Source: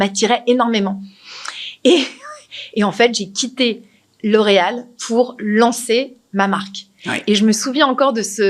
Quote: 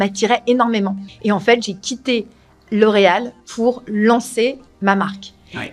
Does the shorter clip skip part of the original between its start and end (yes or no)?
yes